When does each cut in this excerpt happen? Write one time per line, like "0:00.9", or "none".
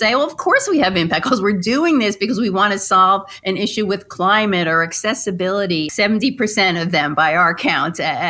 0:05.9